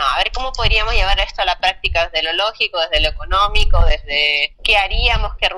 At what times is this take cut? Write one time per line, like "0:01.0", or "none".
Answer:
none

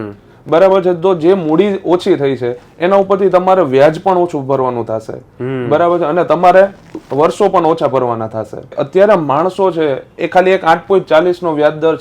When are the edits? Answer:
0:08.8

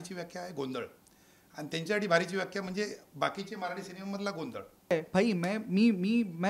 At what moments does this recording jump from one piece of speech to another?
0:04.9

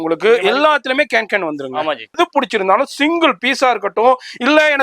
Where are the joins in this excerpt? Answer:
0:02.2

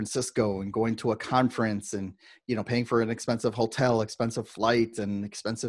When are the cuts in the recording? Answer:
none

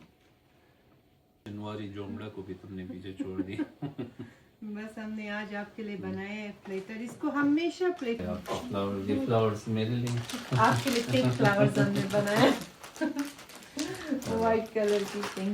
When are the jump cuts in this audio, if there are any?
0:01.4
0:08.2

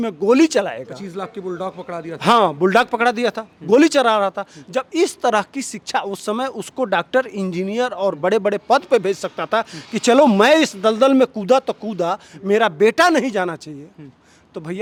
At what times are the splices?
none

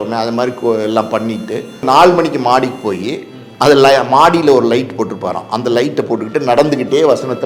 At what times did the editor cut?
0:01.8

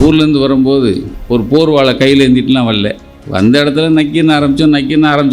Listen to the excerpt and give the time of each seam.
0:01.1

